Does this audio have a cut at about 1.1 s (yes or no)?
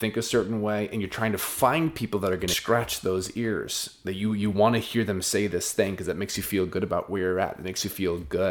no